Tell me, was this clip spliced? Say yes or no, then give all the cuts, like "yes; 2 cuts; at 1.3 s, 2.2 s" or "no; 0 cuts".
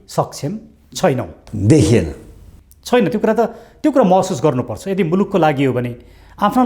no; 0 cuts